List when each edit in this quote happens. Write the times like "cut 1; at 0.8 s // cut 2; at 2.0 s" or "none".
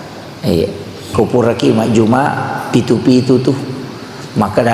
cut 1; at 1.1 s